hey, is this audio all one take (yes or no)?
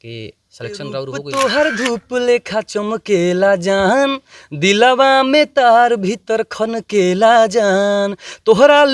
no